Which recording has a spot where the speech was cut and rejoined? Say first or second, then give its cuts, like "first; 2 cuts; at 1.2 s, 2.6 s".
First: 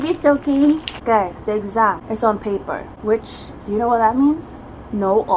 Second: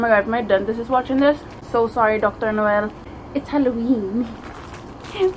first; 2 cuts; at 0.9 s, 2.4 s